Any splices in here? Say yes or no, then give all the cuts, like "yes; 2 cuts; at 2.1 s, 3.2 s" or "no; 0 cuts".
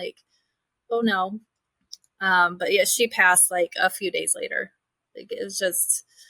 yes; 1 cut; at 1.5 s